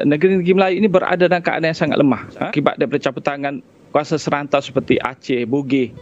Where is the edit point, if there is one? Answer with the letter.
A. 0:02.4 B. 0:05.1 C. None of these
A